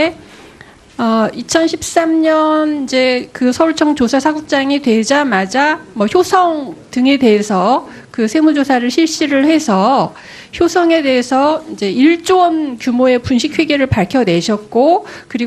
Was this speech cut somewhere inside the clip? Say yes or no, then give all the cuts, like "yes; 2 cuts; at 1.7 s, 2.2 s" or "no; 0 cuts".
yes; 1 cut; at 8.1 s